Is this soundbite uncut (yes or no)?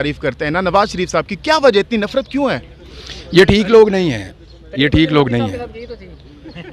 yes